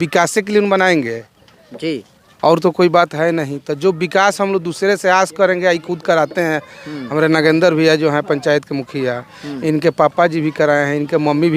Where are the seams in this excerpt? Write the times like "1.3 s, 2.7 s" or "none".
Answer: none